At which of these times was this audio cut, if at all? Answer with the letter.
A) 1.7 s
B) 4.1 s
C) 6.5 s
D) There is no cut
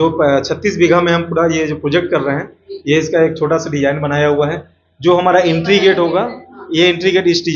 D